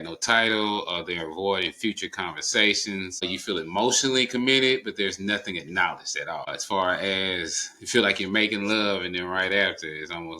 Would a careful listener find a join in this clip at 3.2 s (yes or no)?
yes